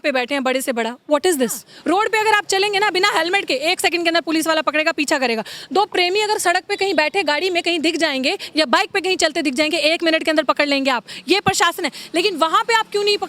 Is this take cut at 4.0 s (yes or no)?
no